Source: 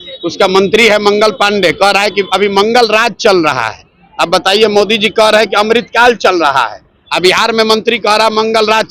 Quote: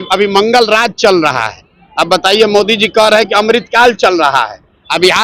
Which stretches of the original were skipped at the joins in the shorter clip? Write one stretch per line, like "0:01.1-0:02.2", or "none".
none